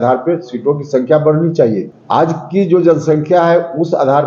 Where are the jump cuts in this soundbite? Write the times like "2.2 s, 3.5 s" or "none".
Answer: 1.9 s

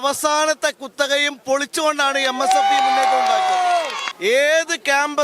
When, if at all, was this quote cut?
4.0 s

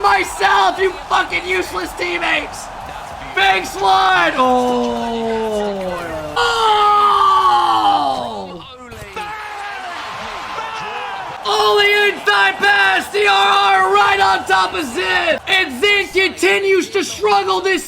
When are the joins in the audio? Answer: 6.4 s, 11.4 s, 15.4 s

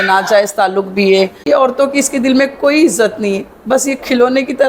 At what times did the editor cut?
1.4 s

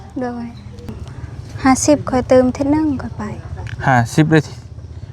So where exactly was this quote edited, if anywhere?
0.9 s

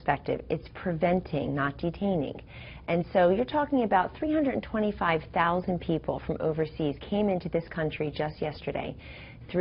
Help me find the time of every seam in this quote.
2.5 s

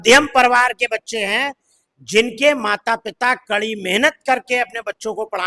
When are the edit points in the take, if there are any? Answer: none

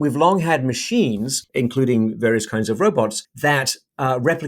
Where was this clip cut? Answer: 1.4 s, 3.2 s

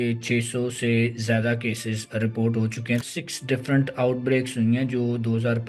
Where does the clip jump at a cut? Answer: 3.1 s

